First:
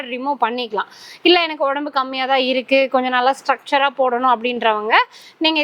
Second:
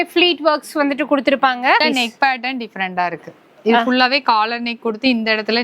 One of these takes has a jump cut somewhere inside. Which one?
second; 1 cut; at 1.8 s

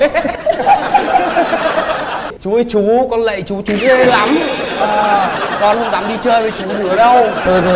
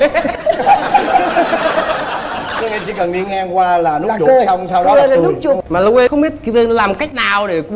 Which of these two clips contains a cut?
first; 1 cut; at 2.4 s

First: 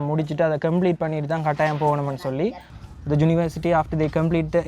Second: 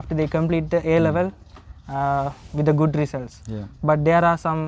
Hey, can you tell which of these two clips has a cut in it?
first; 1 cut; at 2.7 s

